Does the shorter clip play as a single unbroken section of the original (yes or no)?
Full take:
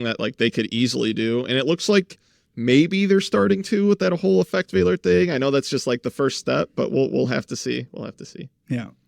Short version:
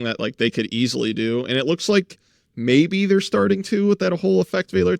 yes